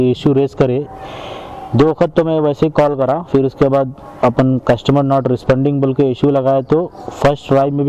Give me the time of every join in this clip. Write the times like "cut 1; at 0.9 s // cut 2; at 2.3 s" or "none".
none

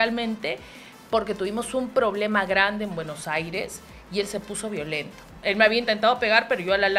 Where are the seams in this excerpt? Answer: cut 1; at 5.3 s

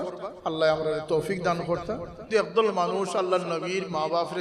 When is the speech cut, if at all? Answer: cut 1; at 2.2 s

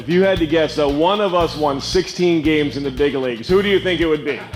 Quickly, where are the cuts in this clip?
none

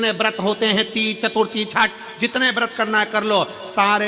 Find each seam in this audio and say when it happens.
none

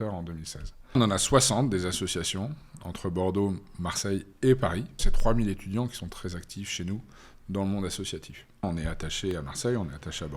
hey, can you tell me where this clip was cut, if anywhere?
cut 1; at 1.0 s // cut 2; at 5.1 s // cut 3; at 8.6 s

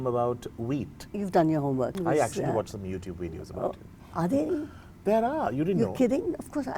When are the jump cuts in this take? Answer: cut 1; at 1.0 s // cut 2; at 2.0 s

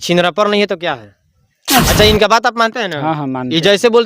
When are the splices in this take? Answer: cut 1; at 1.9 s

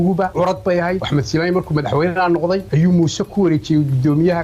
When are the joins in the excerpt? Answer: cut 1; at 1.0 s // cut 2; at 2.7 s

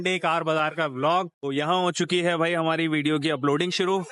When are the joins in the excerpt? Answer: cut 1; at 1.3 s

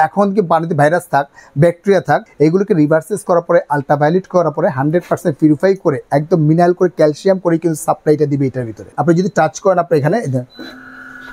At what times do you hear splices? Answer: cut 1; at 2.3 s // cut 2; at 8.9 s

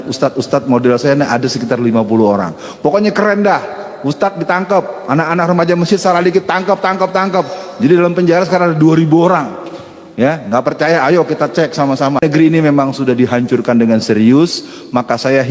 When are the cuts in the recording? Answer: cut 1; at 12.2 s

